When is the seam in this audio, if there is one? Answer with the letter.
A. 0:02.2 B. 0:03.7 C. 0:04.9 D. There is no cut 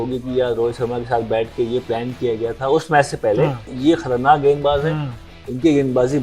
B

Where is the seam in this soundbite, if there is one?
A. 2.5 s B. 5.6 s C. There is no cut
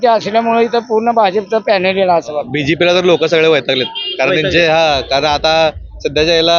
A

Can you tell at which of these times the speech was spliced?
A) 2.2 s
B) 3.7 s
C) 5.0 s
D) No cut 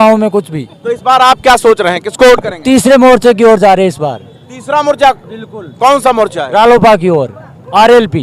D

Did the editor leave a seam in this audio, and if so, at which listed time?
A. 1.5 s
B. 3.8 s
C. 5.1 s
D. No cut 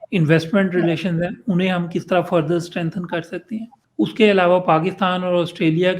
B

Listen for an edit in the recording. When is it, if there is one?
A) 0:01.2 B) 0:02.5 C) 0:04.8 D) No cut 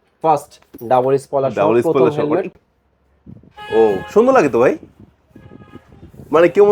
B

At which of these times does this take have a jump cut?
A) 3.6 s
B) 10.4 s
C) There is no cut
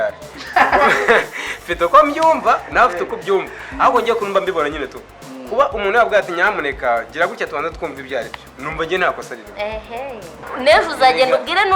B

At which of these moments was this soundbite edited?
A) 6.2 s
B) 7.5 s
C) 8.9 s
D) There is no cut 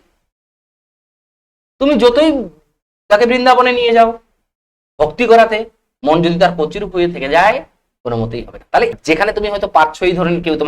C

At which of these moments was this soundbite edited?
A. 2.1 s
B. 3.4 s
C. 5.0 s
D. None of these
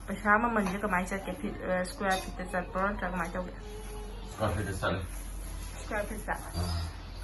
D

